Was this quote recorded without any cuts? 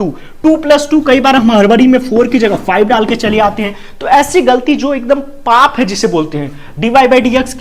yes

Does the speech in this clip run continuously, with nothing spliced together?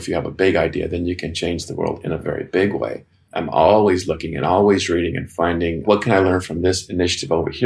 yes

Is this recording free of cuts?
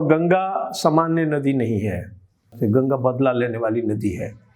no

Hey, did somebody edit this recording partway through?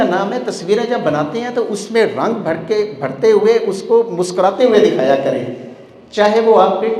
no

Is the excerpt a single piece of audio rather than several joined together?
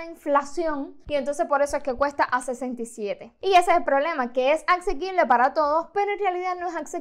yes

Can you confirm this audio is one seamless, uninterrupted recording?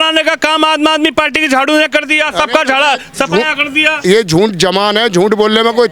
yes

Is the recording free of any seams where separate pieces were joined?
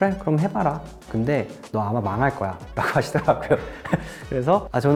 yes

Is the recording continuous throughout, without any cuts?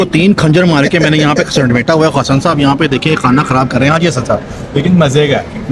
yes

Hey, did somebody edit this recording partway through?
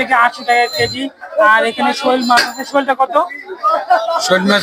no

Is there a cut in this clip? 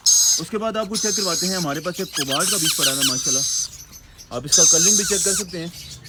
no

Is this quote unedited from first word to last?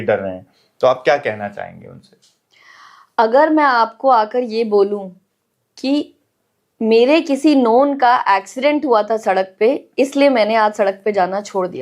yes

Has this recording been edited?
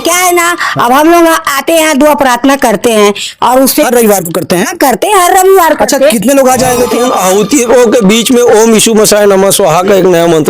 yes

